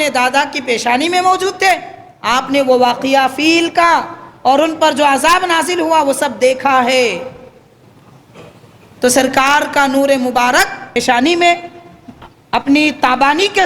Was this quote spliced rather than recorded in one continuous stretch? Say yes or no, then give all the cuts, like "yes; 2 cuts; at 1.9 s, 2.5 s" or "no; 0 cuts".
yes; 1 cut; at 11.0 s